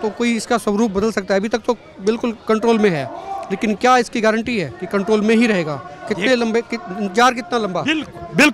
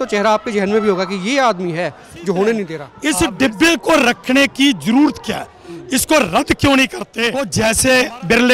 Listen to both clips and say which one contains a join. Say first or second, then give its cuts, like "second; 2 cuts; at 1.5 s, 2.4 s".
second; 2 cuts; at 2.8 s, 7.4 s